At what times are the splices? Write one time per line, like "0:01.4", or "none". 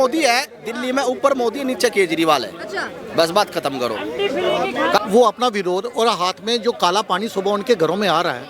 0:05.0